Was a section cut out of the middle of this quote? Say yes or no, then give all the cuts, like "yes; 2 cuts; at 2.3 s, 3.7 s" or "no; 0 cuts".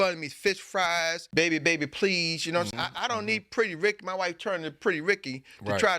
yes; 1 cut; at 1.2 s